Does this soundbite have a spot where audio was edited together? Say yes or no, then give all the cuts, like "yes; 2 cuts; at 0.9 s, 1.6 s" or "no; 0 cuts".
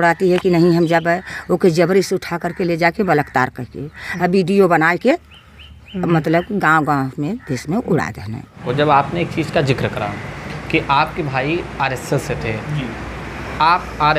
yes; 1 cut; at 8.6 s